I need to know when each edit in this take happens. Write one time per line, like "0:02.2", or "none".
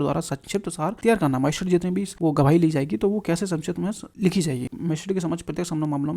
0:01.0
0:02.1
0:04.1
0:04.7